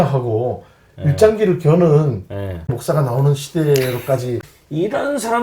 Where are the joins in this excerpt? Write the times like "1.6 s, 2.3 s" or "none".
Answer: 2.7 s, 4.4 s